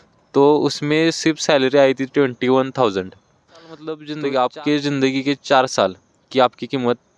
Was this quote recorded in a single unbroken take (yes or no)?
no